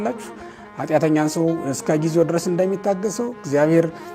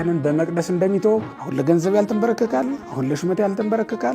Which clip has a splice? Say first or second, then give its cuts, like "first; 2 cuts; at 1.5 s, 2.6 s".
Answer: second; 1 cut; at 1.4 s